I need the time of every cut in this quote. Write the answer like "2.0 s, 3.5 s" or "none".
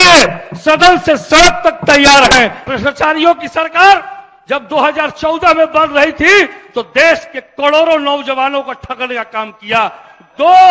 2.6 s